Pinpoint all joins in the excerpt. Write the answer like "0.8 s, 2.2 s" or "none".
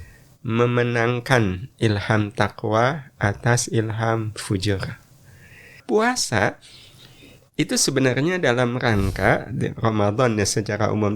5.8 s